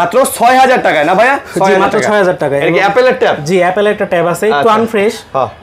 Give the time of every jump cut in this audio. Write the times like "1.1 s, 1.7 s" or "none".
none